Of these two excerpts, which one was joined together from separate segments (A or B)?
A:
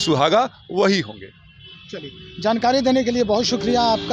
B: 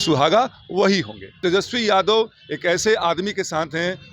B